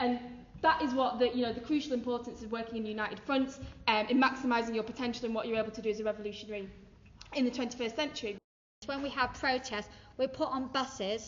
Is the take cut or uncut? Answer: cut